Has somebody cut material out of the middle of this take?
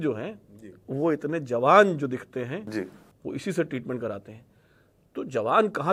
no; 0 cuts

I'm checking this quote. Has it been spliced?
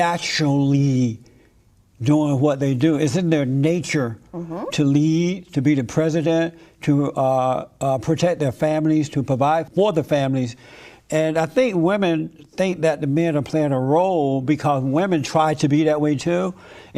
no; 0 cuts

